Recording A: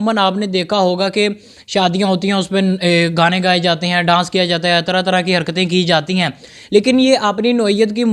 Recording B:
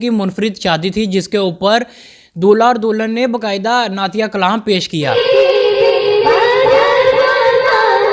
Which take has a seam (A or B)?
B